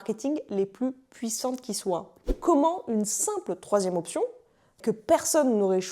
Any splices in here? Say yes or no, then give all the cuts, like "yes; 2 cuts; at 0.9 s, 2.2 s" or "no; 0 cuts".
yes; 1 cut; at 2.1 s